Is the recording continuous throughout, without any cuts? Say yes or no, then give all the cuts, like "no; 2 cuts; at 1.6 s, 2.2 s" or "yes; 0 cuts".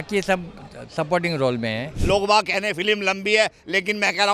no; 1 cut; at 1.9 s